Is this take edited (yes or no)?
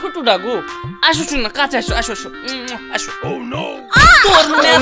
no